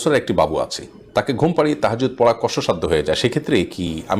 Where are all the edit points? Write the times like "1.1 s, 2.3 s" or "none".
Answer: none